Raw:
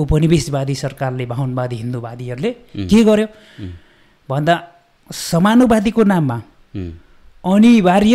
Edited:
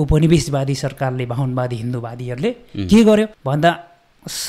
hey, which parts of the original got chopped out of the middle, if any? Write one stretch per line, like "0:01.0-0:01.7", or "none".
0:03.4-0:04.2